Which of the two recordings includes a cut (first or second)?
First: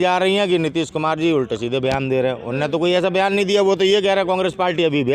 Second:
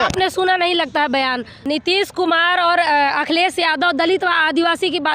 second